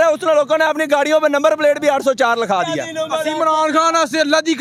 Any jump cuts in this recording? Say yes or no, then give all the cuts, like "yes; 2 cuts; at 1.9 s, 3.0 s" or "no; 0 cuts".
no; 0 cuts